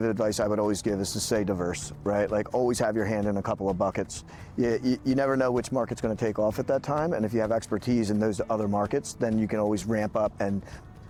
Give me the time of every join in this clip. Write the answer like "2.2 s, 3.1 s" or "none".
none